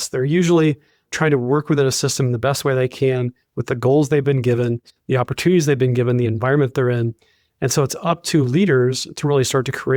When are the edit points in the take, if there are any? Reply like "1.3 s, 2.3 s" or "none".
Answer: 1.1 s